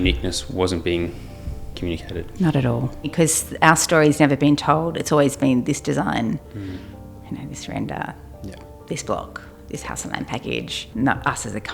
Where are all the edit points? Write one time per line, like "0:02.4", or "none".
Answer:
0:03.1
0:10.8